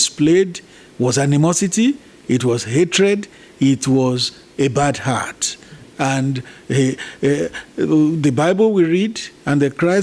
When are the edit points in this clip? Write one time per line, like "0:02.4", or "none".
none